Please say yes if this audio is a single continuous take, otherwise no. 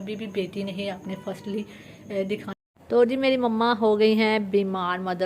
no